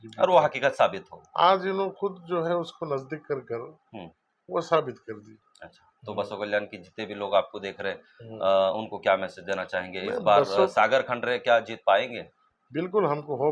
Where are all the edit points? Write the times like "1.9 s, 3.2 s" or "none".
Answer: none

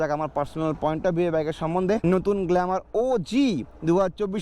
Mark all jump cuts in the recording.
2.0 s

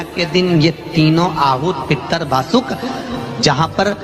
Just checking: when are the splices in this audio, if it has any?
3.0 s

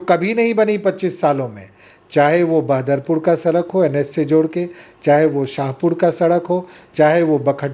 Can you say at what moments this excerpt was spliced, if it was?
none

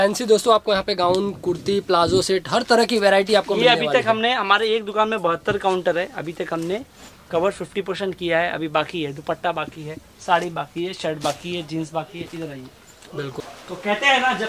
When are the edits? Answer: none

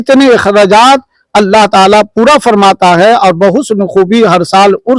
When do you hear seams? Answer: none

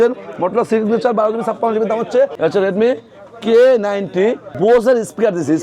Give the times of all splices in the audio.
2.3 s, 4.5 s

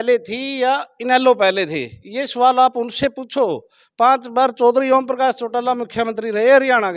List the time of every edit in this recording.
none

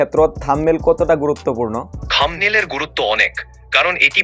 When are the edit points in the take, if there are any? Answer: 2.0 s

